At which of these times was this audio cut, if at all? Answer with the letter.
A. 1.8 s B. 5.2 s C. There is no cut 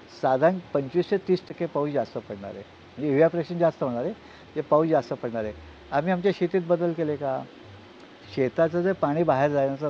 C